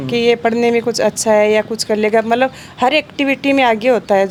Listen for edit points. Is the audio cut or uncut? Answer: uncut